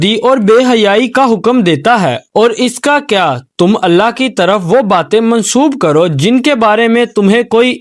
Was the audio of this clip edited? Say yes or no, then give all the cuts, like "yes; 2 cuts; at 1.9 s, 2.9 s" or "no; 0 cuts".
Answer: no; 0 cuts